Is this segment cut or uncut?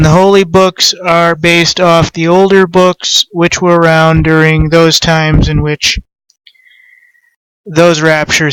cut